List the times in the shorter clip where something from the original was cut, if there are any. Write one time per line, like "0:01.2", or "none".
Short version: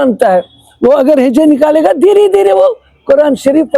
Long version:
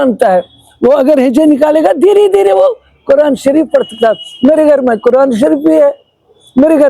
none